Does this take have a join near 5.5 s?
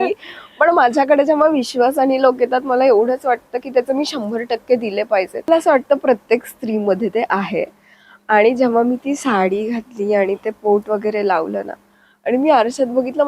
yes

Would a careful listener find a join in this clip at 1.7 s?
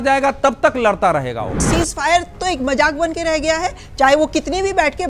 yes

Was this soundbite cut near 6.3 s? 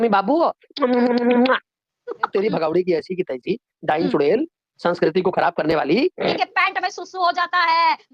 yes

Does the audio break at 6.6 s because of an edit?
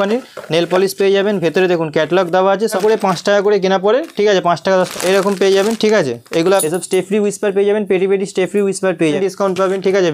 yes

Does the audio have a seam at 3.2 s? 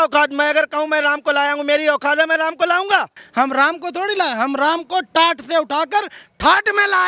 yes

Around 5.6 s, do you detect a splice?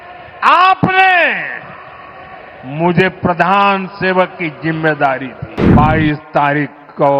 yes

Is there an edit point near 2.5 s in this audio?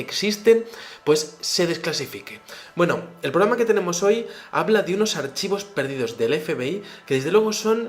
yes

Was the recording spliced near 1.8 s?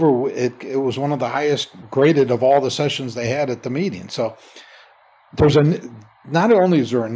yes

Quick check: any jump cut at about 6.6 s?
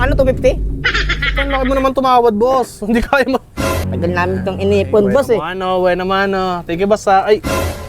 no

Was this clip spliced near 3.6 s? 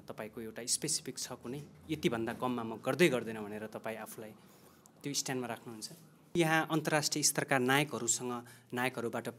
no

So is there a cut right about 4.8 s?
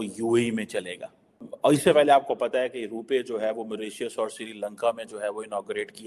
no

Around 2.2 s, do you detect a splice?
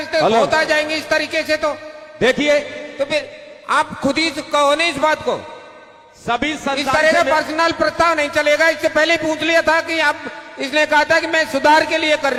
no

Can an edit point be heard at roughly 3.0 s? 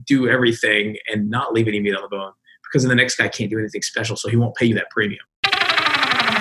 no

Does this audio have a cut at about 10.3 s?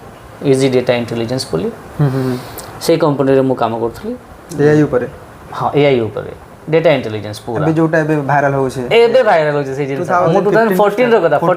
yes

